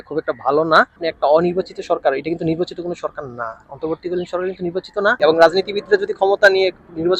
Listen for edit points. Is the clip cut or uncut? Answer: cut